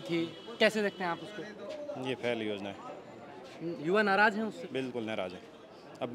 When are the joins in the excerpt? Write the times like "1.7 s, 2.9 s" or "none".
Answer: none